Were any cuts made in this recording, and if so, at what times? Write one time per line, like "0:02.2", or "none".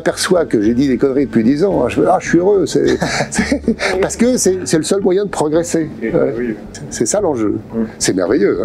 none